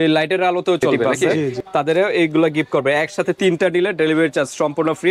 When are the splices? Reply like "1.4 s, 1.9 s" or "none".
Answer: 1.6 s